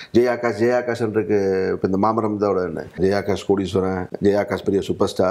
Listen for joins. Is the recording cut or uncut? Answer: cut